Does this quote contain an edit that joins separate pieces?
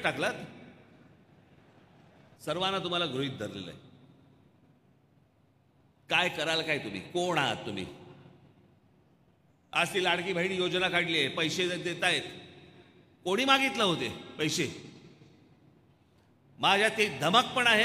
yes; 3 cuts; at 2.3 s, 9.5 s, 16.3 s

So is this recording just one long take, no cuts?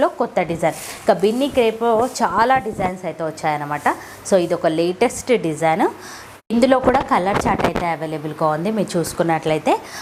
yes; 0 cuts

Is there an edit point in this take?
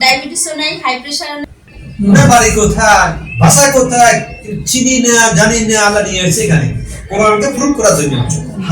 yes; 1 cut; at 1.5 s

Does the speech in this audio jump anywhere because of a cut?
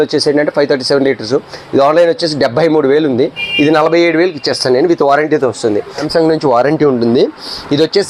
yes; 1 cut; at 6.0 s

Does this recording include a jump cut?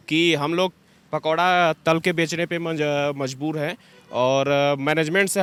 no; 0 cuts

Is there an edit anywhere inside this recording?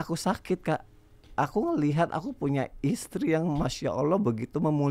no; 0 cuts

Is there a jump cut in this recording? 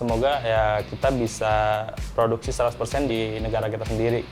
yes; 1 cut; at 3.1 s

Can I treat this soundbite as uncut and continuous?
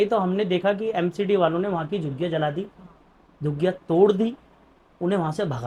yes; 0 cuts

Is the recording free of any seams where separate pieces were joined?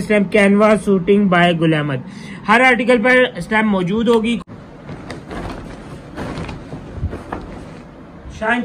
no; 1 cut; at 4.4 s

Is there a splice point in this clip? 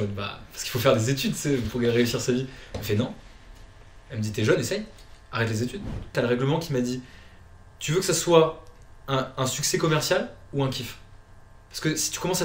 yes; 1 cut; at 6.1 s

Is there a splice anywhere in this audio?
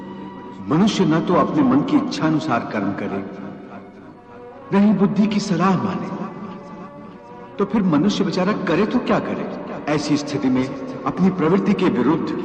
yes; 1 cut; at 9.7 s

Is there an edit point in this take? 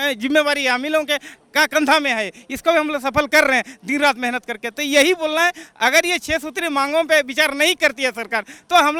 no; 0 cuts

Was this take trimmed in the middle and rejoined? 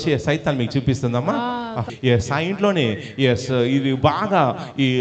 yes; 1 cut; at 1.9 s

